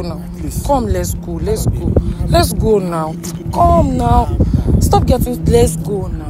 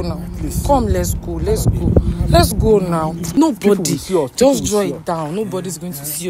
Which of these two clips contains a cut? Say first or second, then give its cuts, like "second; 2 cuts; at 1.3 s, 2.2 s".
second; 1 cut; at 3.3 s